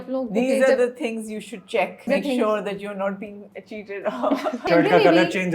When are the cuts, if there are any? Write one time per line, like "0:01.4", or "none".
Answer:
0:02.1
0:04.6